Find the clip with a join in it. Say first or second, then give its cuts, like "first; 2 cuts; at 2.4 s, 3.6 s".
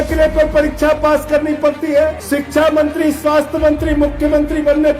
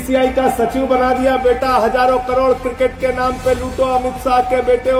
first; 1 cut; at 2.2 s